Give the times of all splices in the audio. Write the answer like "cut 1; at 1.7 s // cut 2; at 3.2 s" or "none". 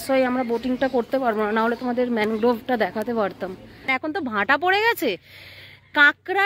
cut 1; at 3.9 s